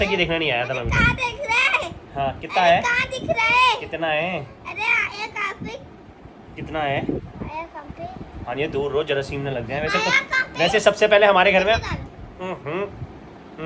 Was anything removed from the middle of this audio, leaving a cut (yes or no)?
no